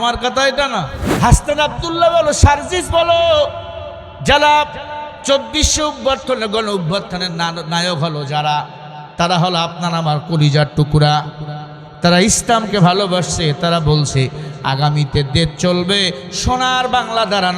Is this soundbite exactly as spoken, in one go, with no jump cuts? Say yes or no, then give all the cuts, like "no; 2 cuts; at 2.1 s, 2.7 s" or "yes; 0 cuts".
no; 1 cut; at 1.0 s